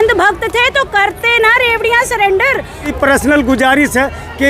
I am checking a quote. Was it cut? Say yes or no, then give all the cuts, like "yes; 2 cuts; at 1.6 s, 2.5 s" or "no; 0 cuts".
yes; 1 cut; at 2.9 s